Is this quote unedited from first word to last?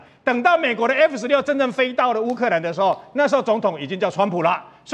yes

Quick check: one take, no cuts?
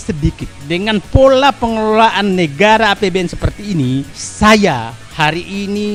yes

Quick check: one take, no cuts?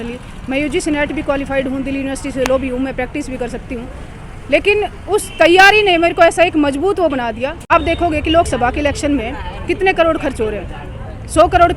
no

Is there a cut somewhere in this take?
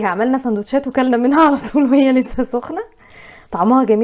no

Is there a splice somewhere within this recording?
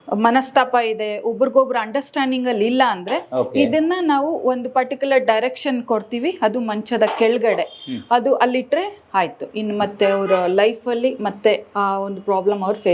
no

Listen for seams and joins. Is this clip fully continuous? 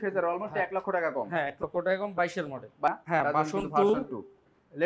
no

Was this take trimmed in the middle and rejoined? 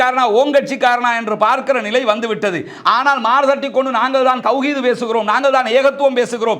no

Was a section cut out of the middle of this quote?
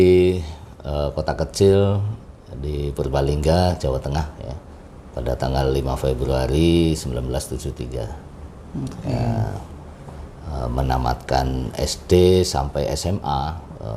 no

